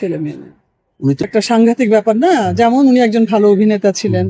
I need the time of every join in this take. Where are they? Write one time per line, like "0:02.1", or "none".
0:01.2